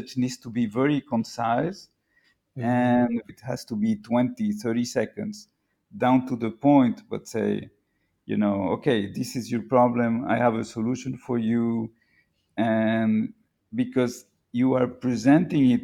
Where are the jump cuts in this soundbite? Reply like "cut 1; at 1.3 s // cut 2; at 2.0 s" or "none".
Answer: cut 1; at 3.3 s